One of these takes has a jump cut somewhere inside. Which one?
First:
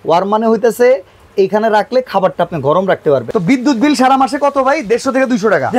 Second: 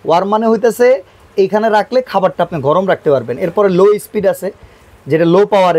first; 1 cut; at 3.3 s

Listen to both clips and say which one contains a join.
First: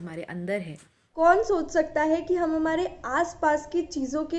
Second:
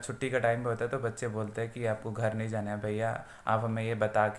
first; 1 cut; at 1.1 s

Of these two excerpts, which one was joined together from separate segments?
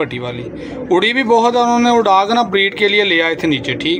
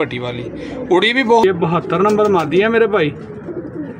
second; 1 cut; at 1.4 s

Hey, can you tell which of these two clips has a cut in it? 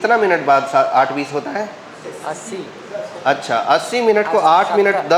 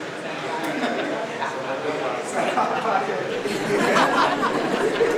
first; 1 cut; at 2.0 s

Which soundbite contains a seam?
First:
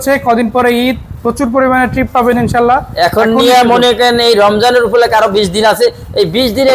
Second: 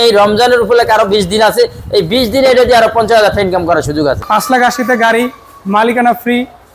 second; 1 cut; at 4.2 s

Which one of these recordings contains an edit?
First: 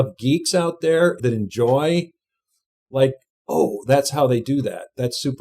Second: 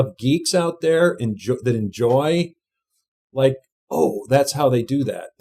first; 1 cut; at 1.2 s

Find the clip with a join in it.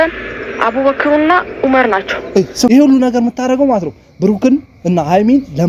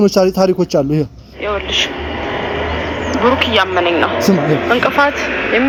first; 1 cut; at 2.7 s

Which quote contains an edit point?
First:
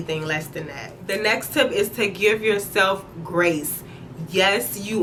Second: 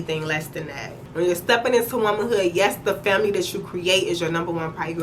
second; 1 cut; at 0.9 s

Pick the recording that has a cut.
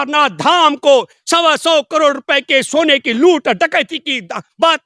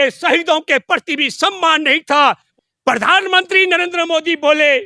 second; 1 cut; at 2.5 s

